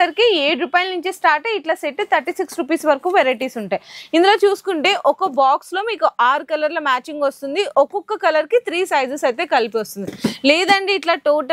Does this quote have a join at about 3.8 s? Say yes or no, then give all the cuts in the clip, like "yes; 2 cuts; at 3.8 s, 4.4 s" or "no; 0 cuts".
no; 0 cuts